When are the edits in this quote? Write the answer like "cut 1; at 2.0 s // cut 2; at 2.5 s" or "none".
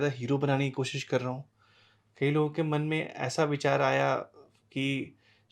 none